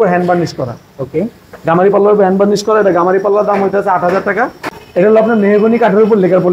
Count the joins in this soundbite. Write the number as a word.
one